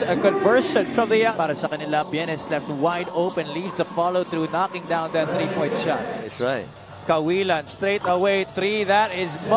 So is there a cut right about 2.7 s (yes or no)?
no